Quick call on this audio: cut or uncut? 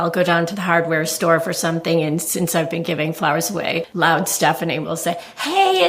cut